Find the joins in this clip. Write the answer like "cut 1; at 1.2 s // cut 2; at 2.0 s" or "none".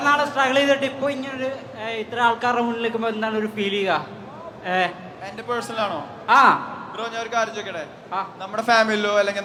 none